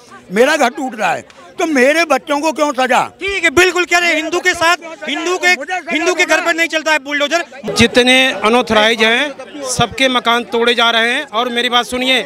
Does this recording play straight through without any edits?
no; 1 cut; at 7.6 s

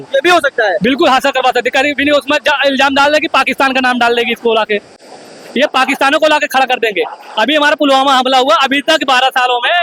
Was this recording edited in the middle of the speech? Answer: no; 0 cuts

